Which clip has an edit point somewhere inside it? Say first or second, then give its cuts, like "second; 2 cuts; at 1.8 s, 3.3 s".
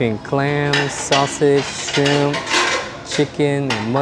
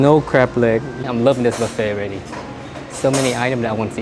second; 1 cut; at 0.9 s